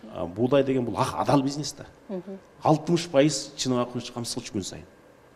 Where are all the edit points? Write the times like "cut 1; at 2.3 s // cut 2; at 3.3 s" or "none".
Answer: none